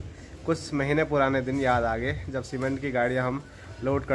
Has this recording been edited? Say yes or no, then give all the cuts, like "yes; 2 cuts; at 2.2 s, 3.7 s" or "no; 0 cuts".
no; 0 cuts